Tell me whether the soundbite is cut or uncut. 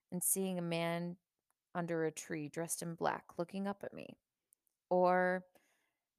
uncut